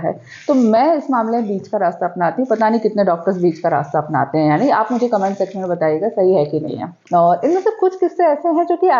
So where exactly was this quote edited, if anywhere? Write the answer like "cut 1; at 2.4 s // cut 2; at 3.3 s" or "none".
cut 1; at 6.9 s

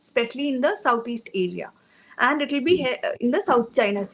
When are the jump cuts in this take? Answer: none

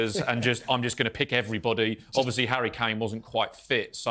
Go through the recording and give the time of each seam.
none

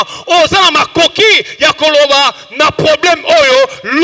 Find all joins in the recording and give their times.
none

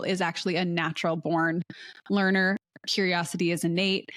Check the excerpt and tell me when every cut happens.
none

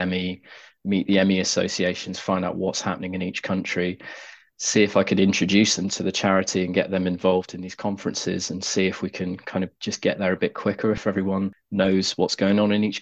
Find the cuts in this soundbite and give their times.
cut 1; at 11.6 s

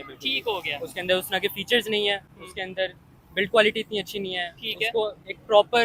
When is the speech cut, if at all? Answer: none

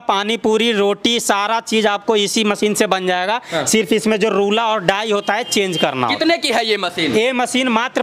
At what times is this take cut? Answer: none

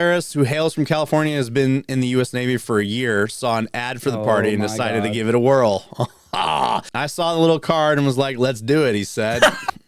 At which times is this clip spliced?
cut 1; at 7.0 s

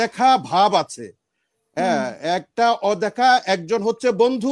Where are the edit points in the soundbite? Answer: none

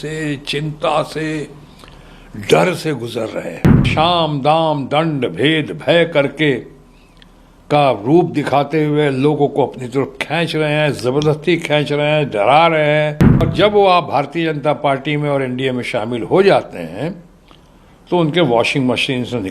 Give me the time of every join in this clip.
cut 1; at 3.9 s // cut 2; at 13.5 s

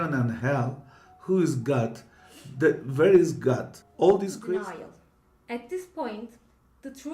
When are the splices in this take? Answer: cut 1; at 4.5 s

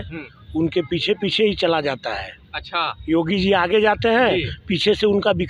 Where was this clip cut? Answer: none

